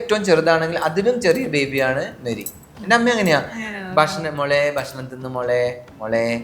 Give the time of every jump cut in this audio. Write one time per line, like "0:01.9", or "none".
none